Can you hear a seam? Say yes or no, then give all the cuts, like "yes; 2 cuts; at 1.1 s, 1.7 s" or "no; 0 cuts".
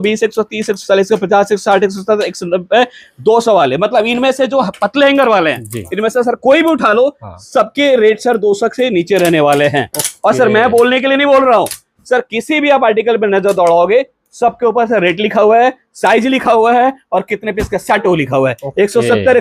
no; 0 cuts